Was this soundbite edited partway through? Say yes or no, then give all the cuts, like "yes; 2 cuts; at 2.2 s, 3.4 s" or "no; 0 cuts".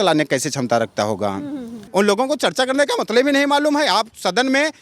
yes; 1 cut; at 1.7 s